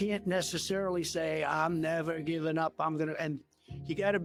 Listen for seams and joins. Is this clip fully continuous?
yes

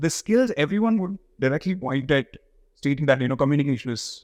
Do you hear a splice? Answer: no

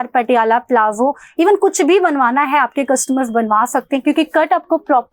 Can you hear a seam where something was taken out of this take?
no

